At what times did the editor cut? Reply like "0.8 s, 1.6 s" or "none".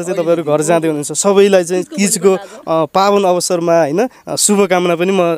none